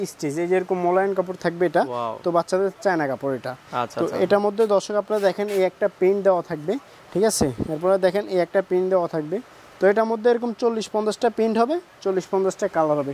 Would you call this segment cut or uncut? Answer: uncut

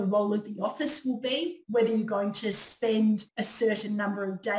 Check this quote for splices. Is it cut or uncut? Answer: cut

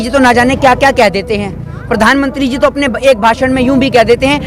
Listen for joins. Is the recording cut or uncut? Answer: uncut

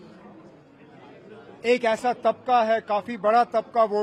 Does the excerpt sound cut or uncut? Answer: uncut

